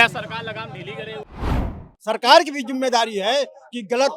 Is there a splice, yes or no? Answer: yes